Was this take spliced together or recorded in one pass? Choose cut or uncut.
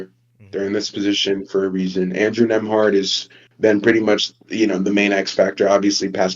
uncut